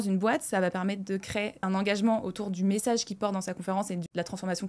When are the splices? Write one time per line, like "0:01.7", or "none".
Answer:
0:01.6